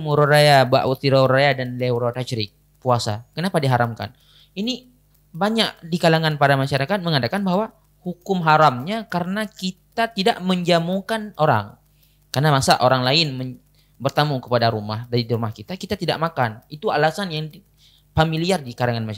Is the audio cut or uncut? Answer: uncut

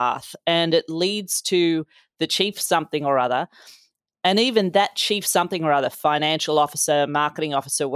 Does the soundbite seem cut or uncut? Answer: uncut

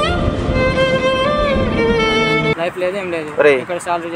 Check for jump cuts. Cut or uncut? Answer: uncut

